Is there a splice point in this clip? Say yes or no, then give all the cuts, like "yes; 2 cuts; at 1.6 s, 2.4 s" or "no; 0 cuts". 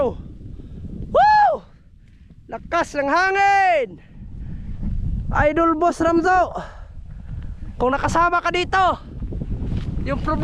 no; 0 cuts